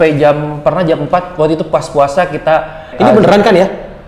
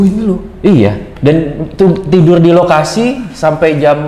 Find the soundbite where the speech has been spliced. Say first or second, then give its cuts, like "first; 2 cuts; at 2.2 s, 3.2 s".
first; 1 cut; at 2.9 s